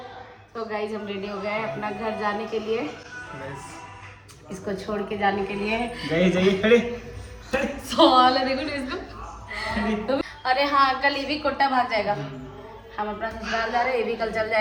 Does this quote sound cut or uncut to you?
uncut